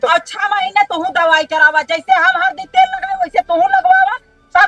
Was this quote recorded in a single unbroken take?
yes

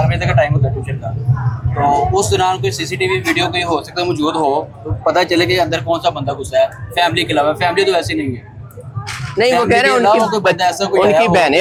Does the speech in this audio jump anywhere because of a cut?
no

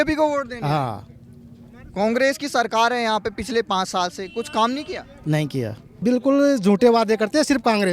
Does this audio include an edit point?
yes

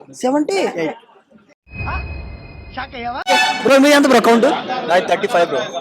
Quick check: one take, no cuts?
no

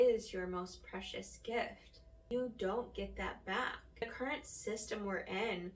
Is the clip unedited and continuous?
no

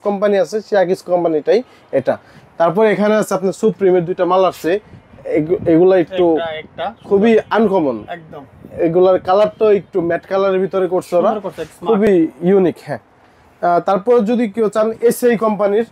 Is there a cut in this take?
no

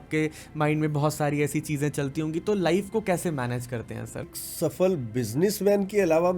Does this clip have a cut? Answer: yes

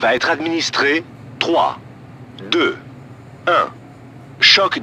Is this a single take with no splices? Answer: yes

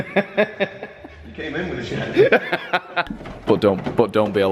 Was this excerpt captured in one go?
yes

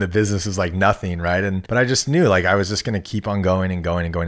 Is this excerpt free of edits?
no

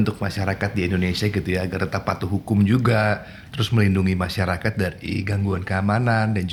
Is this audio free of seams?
yes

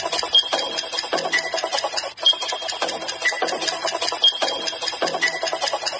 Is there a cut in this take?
yes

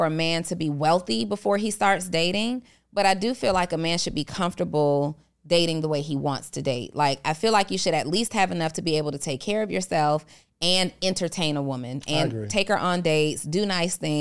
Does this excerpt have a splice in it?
no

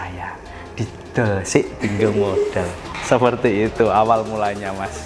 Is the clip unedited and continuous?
yes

